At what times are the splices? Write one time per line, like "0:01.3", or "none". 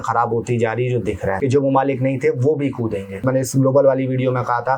0:01.4
0:03.2